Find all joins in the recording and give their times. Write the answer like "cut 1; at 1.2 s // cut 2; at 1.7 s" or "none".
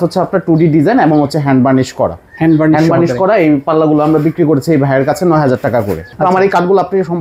cut 1; at 6.0 s